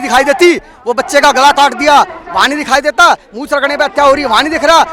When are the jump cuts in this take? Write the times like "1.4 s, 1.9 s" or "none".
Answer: none